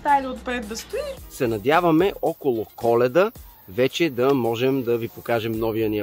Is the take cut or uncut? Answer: cut